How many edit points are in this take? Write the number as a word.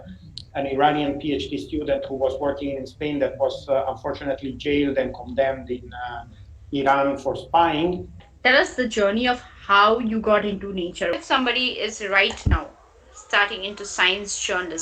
two